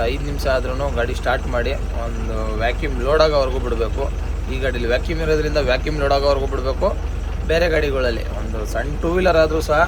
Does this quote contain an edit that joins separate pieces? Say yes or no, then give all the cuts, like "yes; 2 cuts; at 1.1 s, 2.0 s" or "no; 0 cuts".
no; 0 cuts